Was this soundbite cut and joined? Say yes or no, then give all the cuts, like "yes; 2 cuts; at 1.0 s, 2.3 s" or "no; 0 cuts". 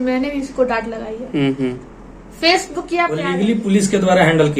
yes; 1 cut; at 3.2 s